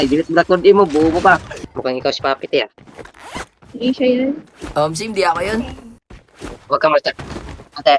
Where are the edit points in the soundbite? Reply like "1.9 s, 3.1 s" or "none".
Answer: 1.5 s

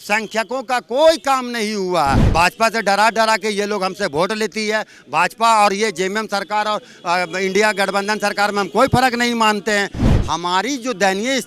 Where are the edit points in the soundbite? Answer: 2.2 s, 10.1 s

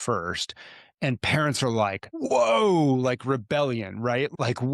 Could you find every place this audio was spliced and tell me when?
none

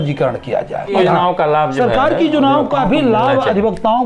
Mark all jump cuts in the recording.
0.9 s

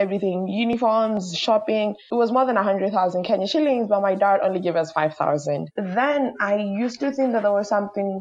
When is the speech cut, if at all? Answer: 2.0 s, 5.7 s

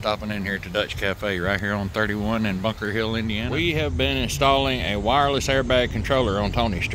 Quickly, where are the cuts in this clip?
3.5 s

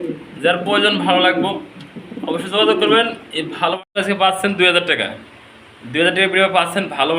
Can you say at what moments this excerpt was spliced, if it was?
3.9 s

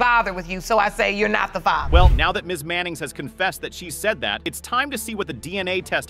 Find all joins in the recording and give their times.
none

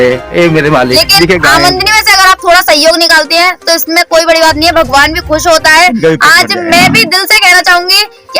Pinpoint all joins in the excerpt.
1.4 s

